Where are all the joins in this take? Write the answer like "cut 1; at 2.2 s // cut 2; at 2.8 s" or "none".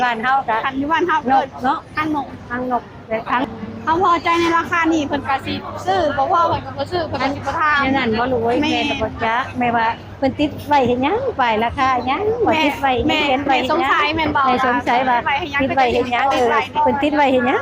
cut 1; at 3.4 s